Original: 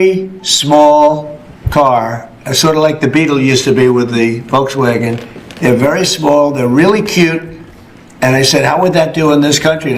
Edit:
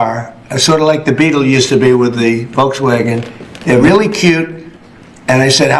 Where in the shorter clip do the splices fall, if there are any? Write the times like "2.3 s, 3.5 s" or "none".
3.8 s